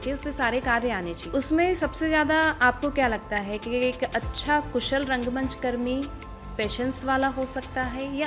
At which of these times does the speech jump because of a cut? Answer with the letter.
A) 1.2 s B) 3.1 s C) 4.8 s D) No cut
A